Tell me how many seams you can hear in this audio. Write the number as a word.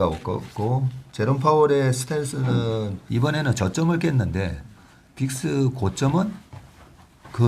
one